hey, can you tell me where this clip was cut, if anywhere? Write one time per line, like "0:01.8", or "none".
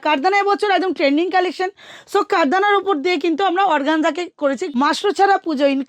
0:04.6